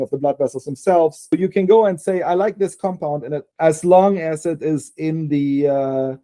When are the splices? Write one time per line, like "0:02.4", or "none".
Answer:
0:01.3
0:03.4